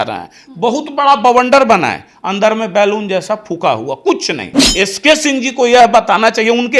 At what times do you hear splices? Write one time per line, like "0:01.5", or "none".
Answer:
0:04.5